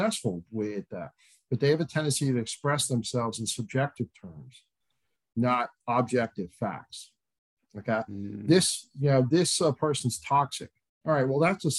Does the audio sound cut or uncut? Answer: uncut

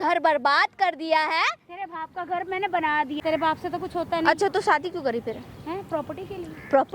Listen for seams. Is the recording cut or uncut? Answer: cut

